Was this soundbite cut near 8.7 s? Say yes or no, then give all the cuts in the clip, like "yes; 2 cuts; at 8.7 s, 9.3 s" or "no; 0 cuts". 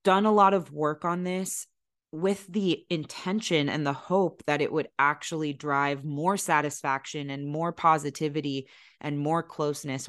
no; 0 cuts